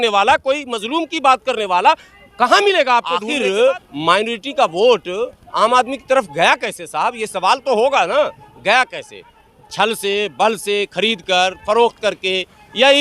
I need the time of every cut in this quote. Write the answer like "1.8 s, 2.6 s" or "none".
3.3 s